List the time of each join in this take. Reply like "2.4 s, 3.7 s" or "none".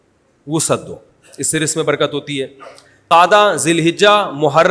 3.1 s